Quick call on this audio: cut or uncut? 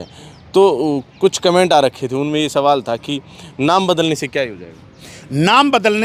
uncut